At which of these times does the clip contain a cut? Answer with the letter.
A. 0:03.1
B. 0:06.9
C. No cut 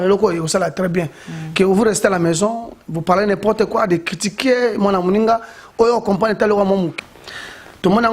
B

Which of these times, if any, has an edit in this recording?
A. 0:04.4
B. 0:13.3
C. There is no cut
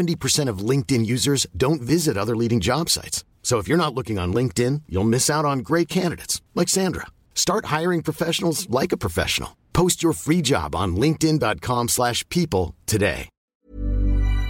B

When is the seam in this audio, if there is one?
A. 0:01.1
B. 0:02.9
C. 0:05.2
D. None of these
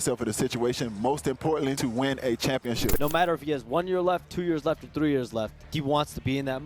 B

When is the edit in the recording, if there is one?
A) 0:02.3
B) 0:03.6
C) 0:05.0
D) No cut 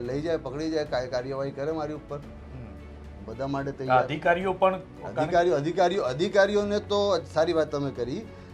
D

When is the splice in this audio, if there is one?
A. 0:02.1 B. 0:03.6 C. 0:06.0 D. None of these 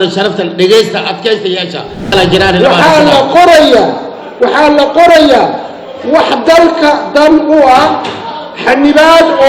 A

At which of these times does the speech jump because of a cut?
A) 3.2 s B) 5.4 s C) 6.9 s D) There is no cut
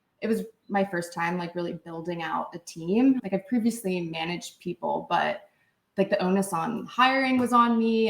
A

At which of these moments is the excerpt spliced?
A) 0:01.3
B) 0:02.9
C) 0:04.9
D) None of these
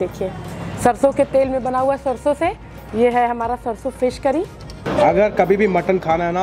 C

